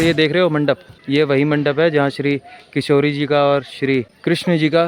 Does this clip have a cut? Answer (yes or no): yes